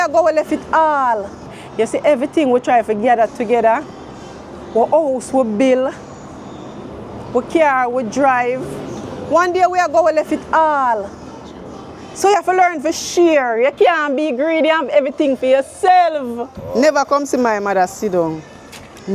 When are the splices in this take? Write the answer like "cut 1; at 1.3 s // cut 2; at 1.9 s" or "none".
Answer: cut 1; at 1.6 s // cut 2; at 16.5 s